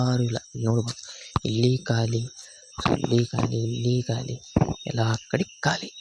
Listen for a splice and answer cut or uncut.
uncut